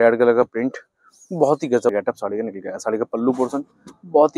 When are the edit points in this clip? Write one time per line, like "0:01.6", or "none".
0:01.9